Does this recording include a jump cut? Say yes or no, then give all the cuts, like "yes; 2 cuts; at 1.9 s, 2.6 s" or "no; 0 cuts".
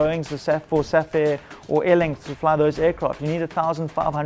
no; 0 cuts